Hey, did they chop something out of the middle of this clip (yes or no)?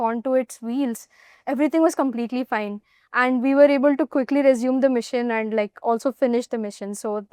no